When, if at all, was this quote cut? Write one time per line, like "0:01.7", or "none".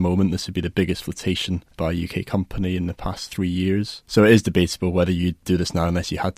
0:01.7
0:04.0
0:05.4

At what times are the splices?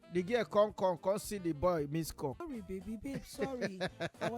0:02.4

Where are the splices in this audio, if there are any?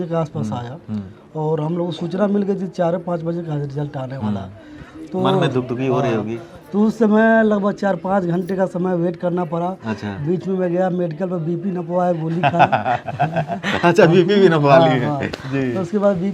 none

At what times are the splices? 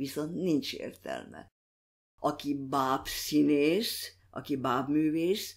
0:02.0

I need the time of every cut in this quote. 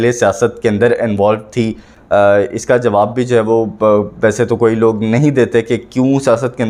none

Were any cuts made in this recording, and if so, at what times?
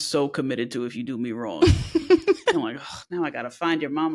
0:02.6

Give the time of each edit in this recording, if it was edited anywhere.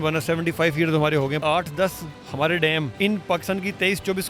0:01.4
0:02.9

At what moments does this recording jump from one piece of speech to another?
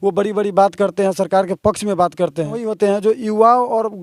0:02.7

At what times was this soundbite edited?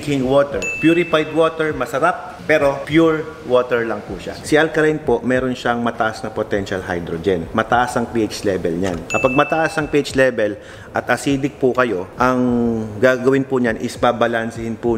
0:04.4

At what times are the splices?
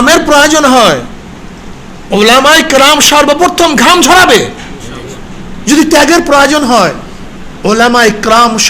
none

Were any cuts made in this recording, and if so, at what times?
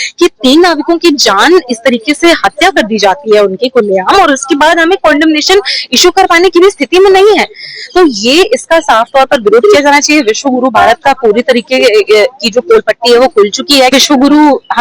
0:13.9

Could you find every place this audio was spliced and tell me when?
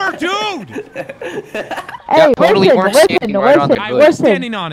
0:02.0
0:03.8

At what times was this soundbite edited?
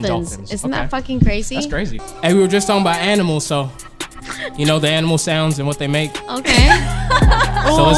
0:01.9

